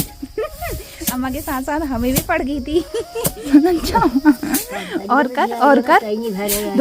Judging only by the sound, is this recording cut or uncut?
cut